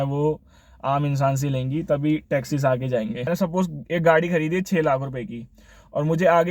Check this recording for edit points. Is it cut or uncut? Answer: cut